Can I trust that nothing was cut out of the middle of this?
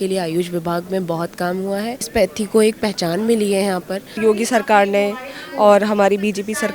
no; 2 cuts; at 2.1 s, 4.0 s

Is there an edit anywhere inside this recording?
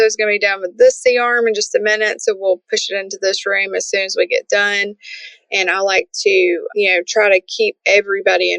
yes; 1 cut; at 6.7 s

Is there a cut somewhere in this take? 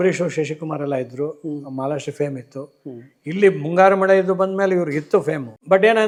no; 0 cuts

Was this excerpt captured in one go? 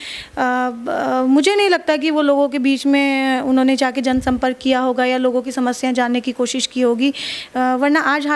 yes; 0 cuts

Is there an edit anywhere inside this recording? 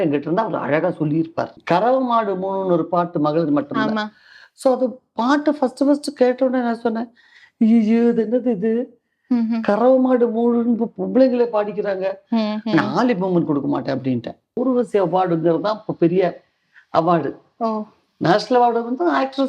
yes; 2 cuts; at 1.6 s, 14.6 s

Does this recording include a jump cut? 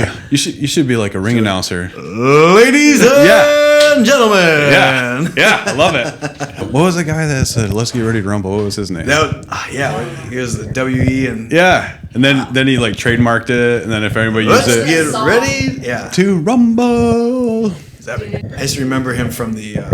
yes; 2 cuts; at 6.6 s, 18.5 s

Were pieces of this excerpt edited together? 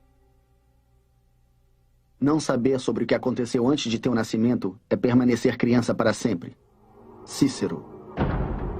yes; 1 cut; at 4.6 s

